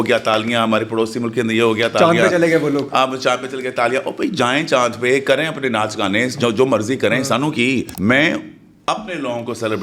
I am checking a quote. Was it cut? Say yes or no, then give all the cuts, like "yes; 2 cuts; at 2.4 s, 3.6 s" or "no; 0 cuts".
yes; 1 cut; at 7.9 s